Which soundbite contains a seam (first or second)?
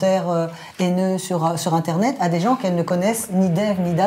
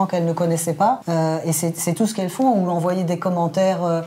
second